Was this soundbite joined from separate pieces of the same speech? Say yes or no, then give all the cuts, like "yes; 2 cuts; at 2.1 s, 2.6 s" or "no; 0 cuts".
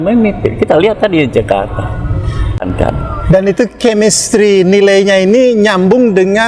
yes; 1 cut; at 2.7 s